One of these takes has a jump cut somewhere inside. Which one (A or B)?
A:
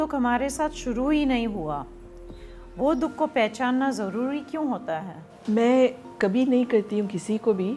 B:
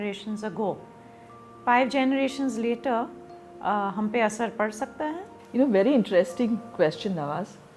B